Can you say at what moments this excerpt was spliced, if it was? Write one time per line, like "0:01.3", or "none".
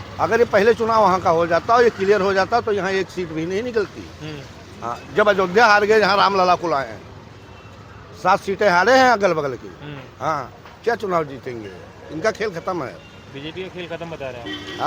none